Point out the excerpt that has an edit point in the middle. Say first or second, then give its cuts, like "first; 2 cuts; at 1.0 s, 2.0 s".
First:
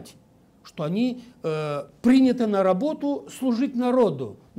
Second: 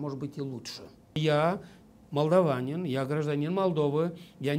second; 1 cut; at 1.2 s